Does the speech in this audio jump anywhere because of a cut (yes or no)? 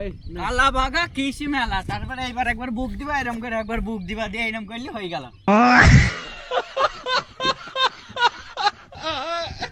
no